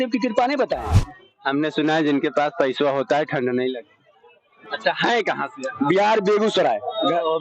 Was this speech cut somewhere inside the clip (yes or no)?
yes